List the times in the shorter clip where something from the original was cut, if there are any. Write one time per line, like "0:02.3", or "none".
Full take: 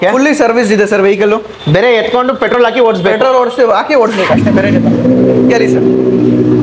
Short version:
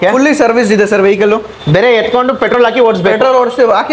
none